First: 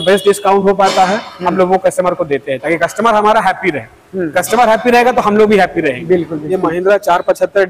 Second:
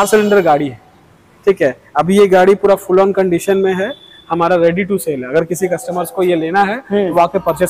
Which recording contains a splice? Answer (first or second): first